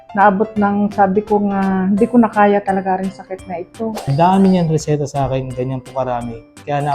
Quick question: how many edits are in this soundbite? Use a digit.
1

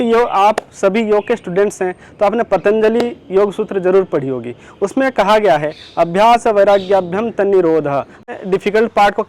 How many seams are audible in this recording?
1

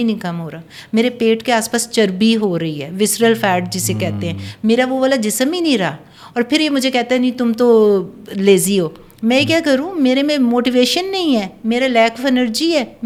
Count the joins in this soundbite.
0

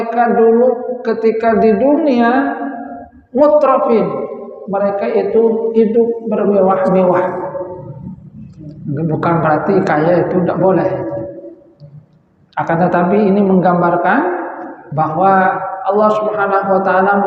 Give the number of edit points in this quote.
0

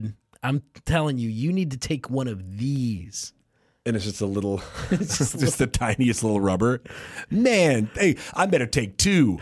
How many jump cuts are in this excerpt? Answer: 0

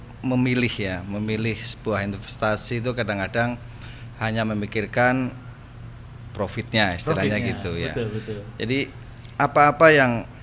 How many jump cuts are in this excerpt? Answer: 0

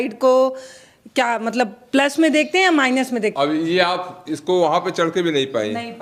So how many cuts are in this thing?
1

